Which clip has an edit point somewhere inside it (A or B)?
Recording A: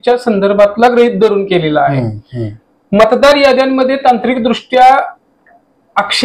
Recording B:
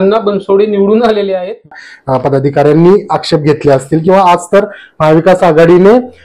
B